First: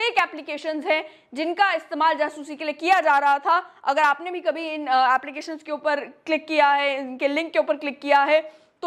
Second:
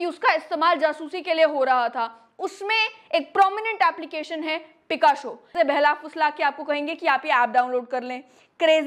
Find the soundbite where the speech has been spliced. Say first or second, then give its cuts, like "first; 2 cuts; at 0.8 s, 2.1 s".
second; 1 cut; at 5.5 s